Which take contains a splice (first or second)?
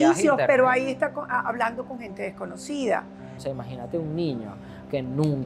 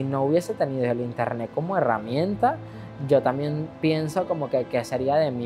first